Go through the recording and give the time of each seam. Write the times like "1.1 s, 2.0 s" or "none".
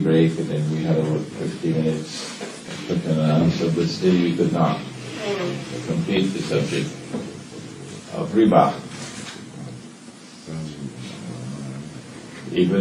none